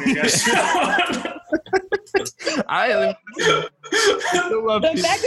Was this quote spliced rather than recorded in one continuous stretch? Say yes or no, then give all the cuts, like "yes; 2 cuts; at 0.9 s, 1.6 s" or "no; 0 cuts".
no; 0 cuts